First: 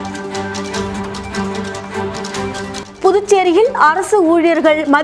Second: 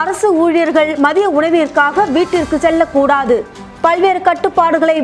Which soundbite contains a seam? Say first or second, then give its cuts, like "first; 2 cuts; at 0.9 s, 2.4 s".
first; 1 cut; at 2.8 s